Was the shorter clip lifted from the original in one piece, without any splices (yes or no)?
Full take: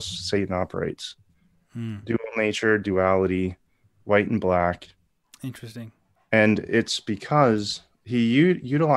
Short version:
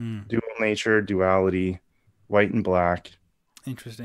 yes